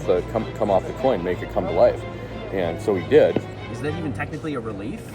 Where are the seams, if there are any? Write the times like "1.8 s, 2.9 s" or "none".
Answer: 3.6 s